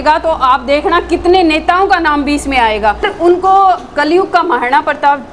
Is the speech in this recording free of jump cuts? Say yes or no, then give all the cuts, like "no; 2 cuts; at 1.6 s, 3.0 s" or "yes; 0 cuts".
no; 1 cut; at 3.1 s